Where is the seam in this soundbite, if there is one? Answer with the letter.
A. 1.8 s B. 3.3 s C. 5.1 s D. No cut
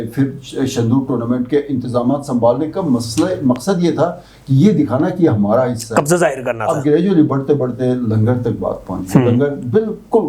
D